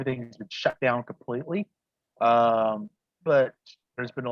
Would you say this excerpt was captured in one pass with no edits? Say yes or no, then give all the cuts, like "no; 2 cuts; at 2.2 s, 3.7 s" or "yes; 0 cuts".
yes; 0 cuts